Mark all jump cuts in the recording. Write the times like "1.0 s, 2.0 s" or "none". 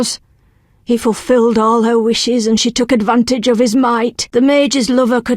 4.2 s